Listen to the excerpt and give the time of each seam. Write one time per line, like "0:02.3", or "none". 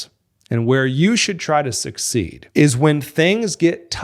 0:02.4